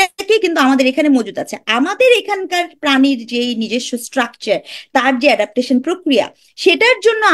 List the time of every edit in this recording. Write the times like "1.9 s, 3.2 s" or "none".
none